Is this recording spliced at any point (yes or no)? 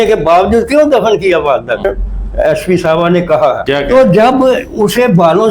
yes